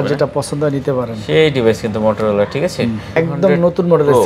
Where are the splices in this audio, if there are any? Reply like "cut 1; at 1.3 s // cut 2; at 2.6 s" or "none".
cut 1; at 3.1 s